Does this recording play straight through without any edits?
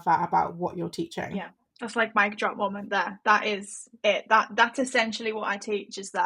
no; 1 cut; at 1.6 s

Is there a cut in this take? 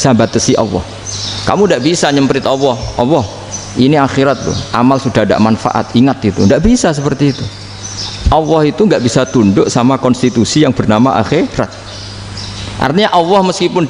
no; 0 cuts

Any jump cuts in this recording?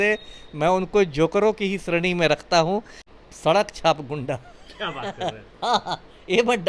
yes; 1 cut; at 3.0 s

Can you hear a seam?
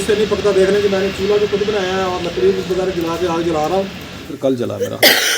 yes; 1 cut; at 4.3 s

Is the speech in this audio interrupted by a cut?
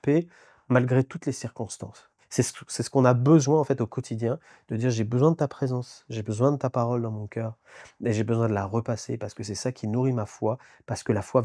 yes; 1 cut; at 2.0 s

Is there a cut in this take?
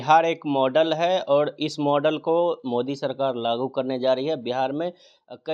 no; 0 cuts

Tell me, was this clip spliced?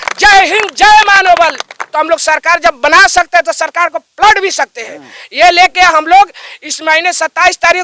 yes; 1 cut; at 1.8 s

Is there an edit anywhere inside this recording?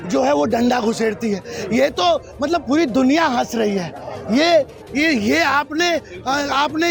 no; 0 cuts

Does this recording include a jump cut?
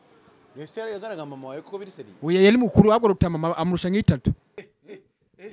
yes; 1 cut; at 4.6 s

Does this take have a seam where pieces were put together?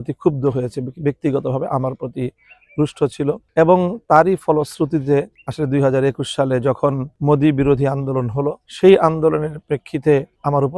no; 0 cuts

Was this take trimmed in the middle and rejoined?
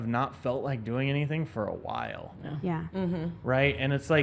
no; 0 cuts

